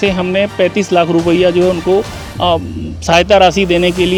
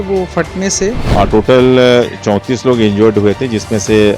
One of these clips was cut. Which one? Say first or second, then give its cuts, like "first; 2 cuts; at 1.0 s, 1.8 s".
second; 1 cut; at 1.0 s